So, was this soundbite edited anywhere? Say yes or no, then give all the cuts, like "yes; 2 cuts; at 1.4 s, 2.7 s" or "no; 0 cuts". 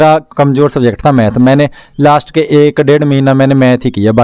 no; 0 cuts